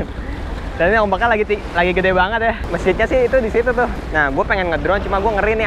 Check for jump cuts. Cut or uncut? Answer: cut